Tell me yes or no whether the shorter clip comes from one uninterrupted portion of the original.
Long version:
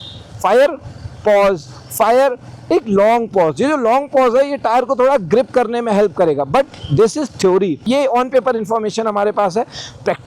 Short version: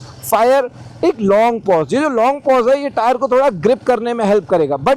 yes